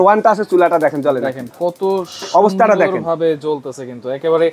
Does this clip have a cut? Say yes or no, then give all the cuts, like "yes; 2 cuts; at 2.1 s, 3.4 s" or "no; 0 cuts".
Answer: no; 0 cuts